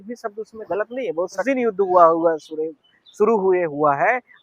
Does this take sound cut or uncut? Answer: cut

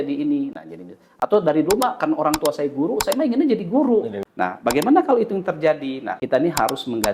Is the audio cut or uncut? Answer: cut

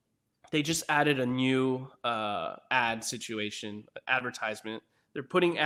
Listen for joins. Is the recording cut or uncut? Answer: uncut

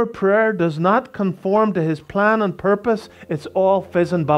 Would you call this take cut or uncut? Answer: uncut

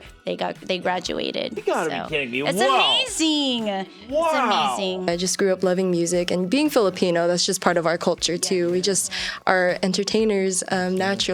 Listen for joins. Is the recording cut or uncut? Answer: cut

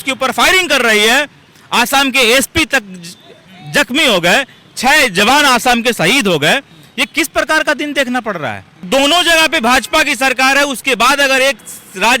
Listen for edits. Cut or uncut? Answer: cut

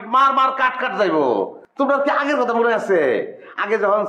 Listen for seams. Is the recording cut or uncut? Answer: cut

